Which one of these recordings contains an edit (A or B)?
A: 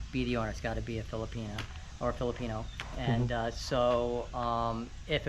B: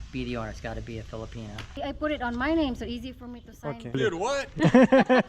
B